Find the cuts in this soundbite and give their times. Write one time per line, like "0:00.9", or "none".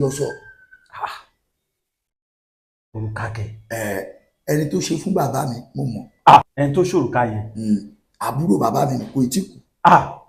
none